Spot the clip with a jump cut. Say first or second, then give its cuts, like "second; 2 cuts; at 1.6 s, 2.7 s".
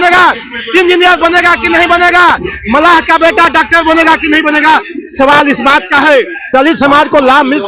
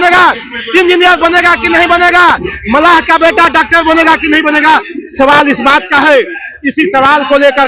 first; 1 cut; at 6.4 s